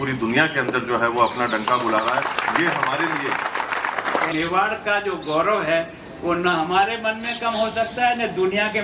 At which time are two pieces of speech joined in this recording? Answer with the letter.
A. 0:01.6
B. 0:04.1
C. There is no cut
B